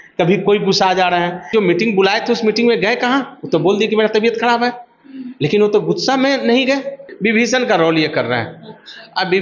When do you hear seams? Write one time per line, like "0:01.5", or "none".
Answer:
0:01.5
0:07.0

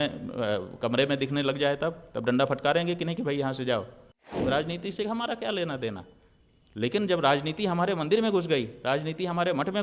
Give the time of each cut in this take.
0:04.3

